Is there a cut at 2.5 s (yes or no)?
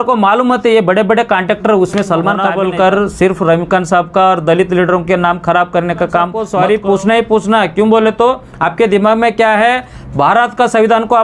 yes